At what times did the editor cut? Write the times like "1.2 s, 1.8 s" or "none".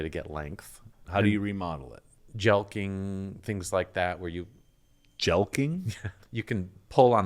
0.9 s, 2.1 s, 6.1 s